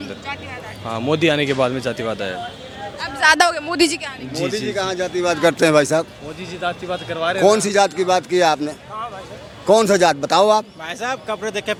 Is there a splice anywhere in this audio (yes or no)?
no